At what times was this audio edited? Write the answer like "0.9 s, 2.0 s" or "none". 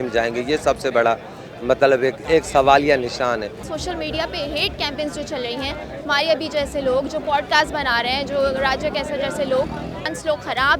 3.6 s, 10.1 s